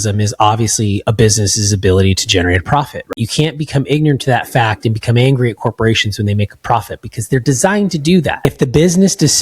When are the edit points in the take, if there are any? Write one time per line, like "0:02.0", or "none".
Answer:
0:03.1
0:08.4

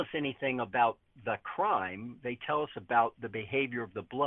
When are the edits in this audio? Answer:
none

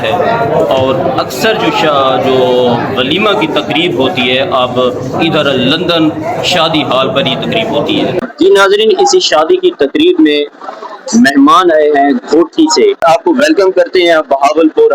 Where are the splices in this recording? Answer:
0:08.3
0:13.0

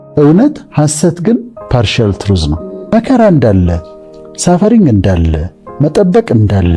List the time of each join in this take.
0:02.9

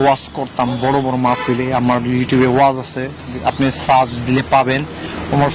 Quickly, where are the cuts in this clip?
none

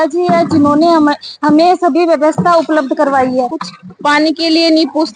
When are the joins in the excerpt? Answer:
0:03.6

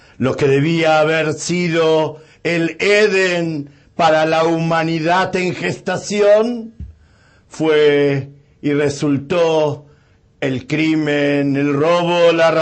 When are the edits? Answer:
0:08.8

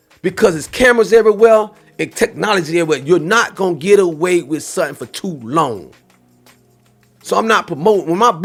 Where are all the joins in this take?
none

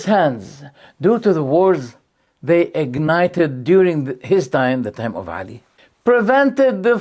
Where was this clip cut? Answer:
none

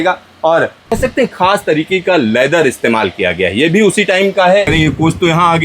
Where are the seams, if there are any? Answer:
0:00.9
0:04.7

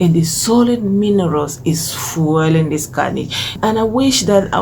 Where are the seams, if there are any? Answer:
0:03.6

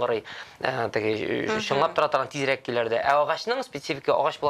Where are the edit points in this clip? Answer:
none

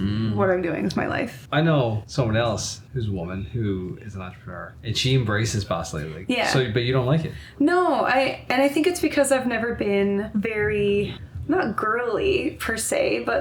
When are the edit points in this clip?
0:01.3
0:02.0
0:02.8
0:04.7
0:06.1
0:10.3
0:11.3

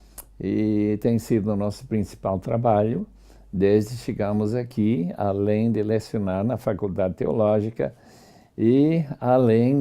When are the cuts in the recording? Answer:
0:07.4

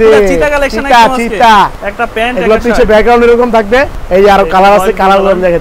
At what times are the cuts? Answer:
0:01.8
0:04.0

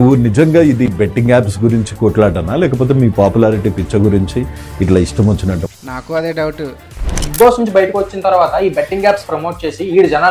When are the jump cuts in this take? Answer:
0:07.3

